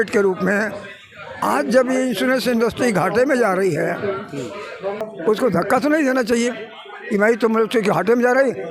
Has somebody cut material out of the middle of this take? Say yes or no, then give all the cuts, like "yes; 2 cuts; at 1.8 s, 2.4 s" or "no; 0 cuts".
yes; 1 cut; at 5.1 s